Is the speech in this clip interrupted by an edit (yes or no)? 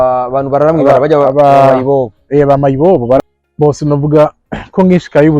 yes